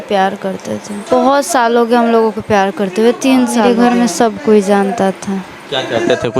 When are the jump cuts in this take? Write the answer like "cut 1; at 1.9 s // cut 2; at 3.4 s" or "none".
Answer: cut 1; at 1.1 s // cut 2; at 3.6 s